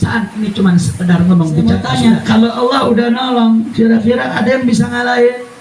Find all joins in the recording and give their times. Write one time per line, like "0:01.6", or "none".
0:01.8

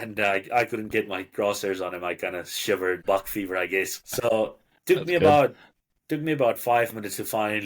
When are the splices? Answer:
0:03.0
0:04.1

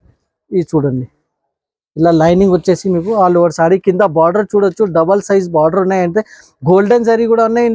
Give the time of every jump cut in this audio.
none

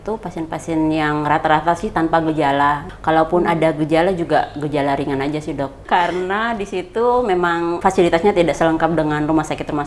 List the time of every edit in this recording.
0:02.9
0:05.8
0:07.8

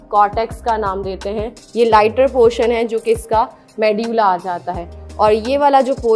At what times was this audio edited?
0:01.6

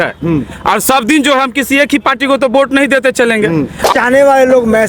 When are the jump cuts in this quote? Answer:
0:03.9

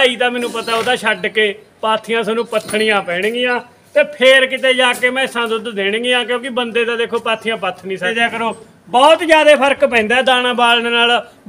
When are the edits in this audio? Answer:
0:08.1

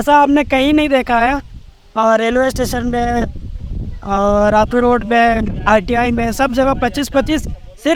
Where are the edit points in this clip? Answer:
none

